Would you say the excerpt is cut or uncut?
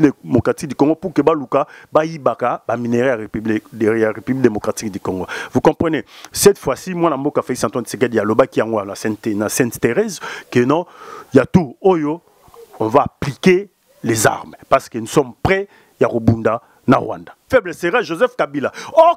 cut